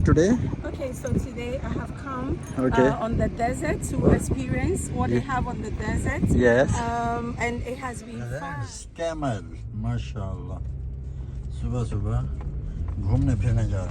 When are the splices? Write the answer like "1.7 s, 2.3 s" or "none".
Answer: 8.4 s